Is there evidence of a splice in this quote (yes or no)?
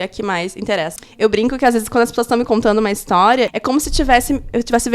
yes